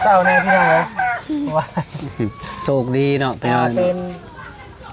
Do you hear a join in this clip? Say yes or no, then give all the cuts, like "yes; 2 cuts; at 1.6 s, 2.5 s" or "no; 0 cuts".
no; 0 cuts